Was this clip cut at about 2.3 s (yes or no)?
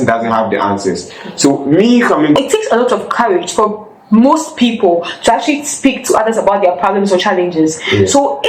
yes